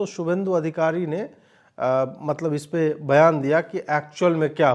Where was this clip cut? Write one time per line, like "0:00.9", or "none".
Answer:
none